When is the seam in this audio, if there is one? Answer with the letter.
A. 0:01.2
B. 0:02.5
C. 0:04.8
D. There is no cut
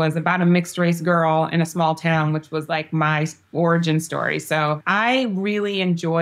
C